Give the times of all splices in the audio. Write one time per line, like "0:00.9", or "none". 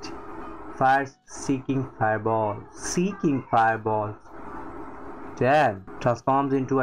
0:05.9